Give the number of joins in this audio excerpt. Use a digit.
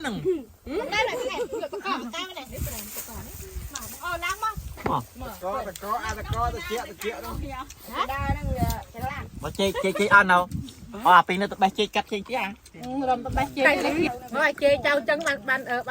1